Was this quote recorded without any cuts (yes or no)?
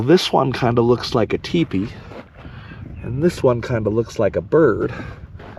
yes